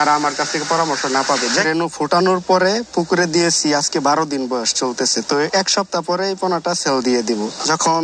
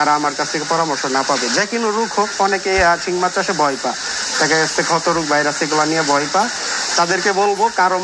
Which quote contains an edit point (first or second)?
first